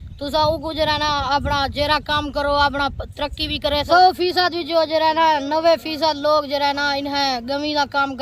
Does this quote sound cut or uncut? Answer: cut